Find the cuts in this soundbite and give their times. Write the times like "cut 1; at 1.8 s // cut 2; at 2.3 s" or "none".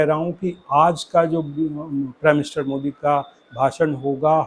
none